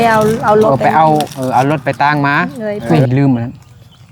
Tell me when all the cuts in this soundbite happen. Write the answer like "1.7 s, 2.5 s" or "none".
2.8 s